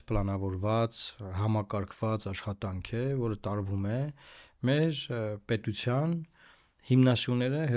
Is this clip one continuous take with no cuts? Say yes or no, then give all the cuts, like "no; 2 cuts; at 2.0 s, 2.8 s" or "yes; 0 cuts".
yes; 0 cuts